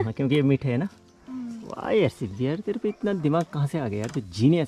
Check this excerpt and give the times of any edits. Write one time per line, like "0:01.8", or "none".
none